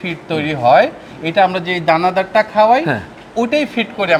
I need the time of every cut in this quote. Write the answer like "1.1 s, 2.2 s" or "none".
none